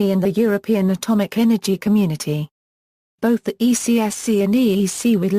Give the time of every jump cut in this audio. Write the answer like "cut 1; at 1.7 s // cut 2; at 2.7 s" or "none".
cut 1; at 1.6 s